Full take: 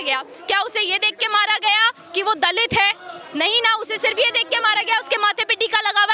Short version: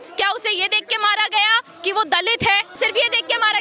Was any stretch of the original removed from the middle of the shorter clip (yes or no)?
yes